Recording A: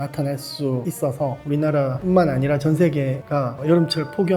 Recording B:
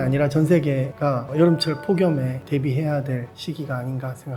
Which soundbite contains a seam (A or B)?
A